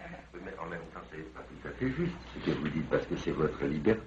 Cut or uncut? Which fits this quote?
cut